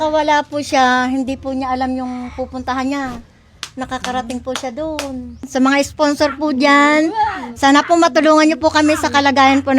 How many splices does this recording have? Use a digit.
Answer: 1